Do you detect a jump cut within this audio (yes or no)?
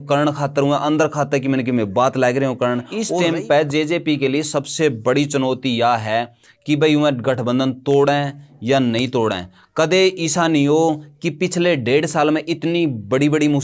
yes